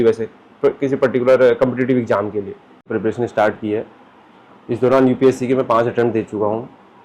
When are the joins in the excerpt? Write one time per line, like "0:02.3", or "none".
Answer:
0:02.8